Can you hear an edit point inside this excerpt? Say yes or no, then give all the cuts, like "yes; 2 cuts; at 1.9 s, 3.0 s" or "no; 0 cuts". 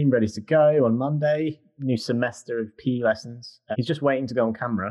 yes; 1 cut; at 1.7 s